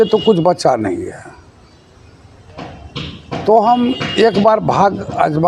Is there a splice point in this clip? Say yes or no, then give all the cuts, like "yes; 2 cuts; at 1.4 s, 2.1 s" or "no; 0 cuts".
no; 0 cuts